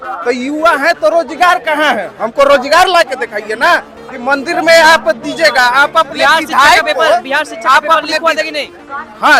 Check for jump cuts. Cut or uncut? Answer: uncut